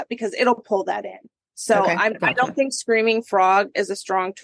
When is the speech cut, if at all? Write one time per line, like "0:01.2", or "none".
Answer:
none